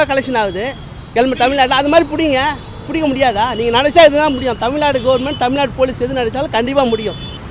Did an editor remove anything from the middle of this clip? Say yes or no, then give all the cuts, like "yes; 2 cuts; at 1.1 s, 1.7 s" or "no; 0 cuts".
no; 0 cuts